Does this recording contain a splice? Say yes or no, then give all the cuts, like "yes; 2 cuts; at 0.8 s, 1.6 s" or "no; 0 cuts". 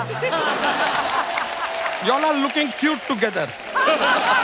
no; 0 cuts